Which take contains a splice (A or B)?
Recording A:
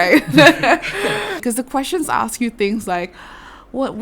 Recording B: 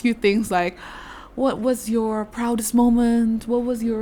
A